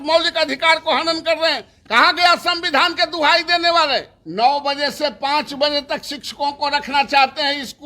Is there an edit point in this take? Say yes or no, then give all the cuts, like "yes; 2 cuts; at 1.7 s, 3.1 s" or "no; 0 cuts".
yes; 1 cut; at 4.2 s